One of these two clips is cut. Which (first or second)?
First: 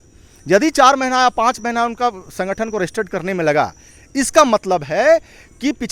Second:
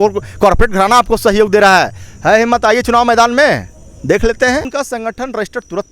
second